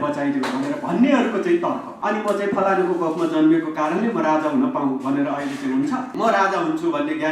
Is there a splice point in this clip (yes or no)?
yes